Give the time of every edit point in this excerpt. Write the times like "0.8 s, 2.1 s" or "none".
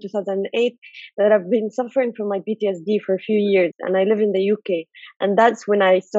none